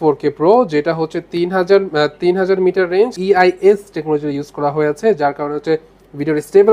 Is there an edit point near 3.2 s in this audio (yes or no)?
yes